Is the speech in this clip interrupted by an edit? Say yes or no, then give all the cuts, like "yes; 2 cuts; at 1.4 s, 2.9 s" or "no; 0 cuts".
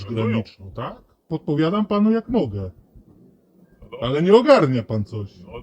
yes; 1 cut; at 1.2 s